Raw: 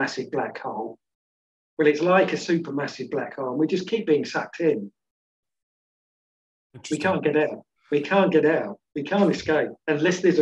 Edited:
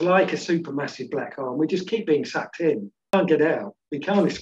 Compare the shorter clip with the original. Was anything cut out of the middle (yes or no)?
yes